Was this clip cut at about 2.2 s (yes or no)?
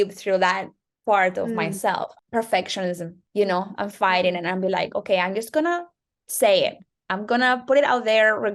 yes